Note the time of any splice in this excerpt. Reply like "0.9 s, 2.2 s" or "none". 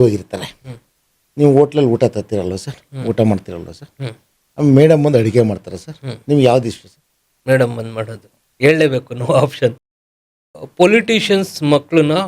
10.1 s

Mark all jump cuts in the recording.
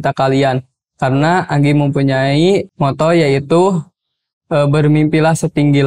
2.7 s

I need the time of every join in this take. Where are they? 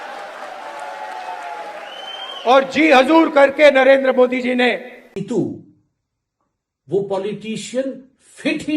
5.2 s

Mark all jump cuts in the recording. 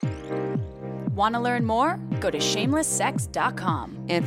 1.1 s

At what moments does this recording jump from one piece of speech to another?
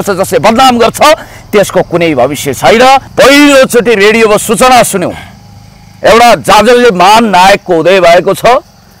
3.1 s

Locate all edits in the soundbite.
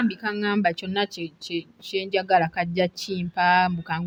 none

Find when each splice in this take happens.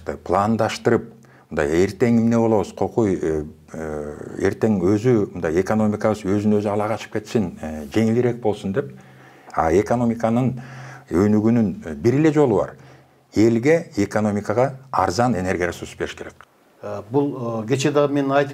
16.3 s

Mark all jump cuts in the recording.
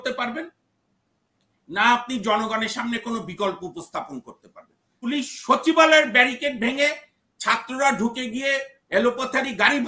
5.1 s

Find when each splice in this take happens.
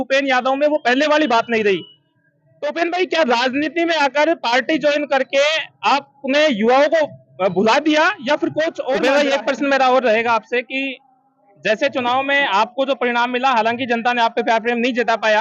9.0 s

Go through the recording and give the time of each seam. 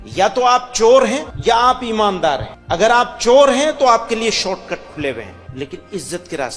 1.3 s, 2.5 s, 5.4 s

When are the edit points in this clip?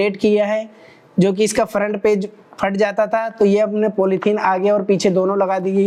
none

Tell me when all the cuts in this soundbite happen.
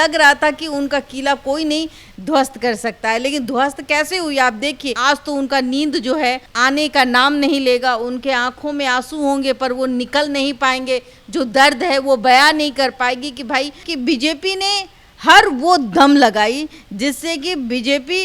5.0 s, 13.9 s

